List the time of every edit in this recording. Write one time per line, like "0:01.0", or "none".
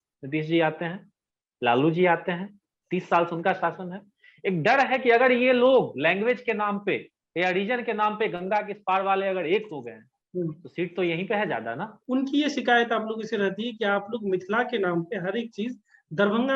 0:11.9